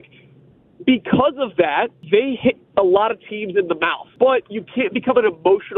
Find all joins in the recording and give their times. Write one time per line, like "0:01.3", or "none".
0:02.0
0:04.0